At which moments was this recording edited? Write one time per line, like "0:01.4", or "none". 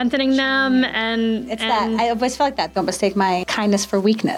0:03.5

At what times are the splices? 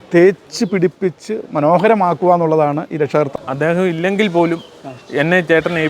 0:03.3

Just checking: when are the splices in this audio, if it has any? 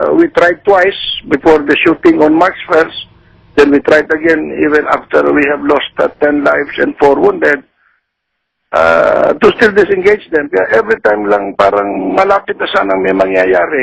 0:12.5

